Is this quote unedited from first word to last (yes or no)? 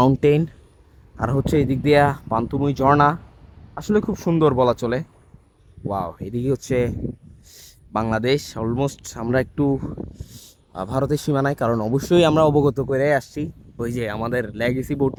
yes